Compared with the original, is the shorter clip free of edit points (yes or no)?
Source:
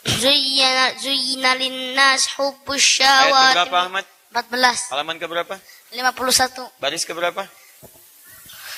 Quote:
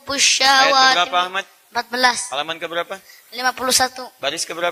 yes